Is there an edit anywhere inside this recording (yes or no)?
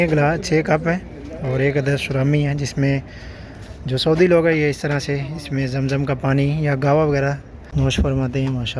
yes